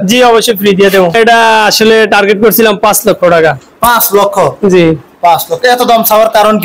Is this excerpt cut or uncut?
cut